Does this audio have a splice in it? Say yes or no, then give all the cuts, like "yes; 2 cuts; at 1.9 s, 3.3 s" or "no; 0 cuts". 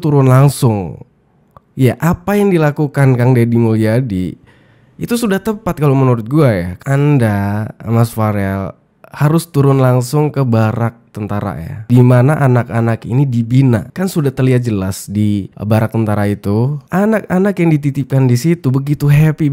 yes; 1 cut; at 6.7 s